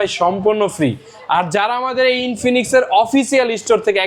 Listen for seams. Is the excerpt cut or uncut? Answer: uncut